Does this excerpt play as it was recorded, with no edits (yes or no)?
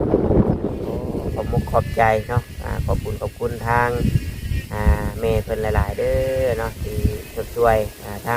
no